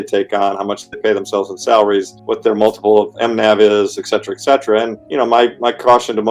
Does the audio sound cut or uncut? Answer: cut